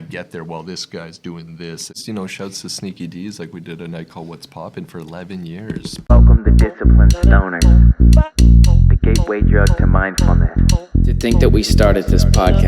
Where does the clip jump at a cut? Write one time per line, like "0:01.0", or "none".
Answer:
0:02.0
0:06.1
0:11.2